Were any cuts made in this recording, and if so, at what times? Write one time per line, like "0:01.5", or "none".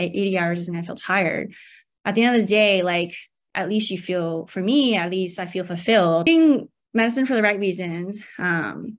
0:06.3